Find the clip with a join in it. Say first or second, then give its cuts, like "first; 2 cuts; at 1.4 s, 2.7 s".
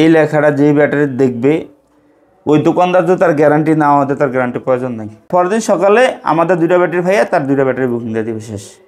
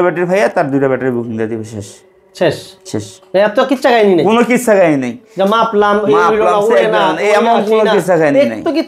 first; 1 cut; at 5.3 s